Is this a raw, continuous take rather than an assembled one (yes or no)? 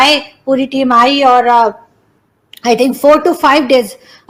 yes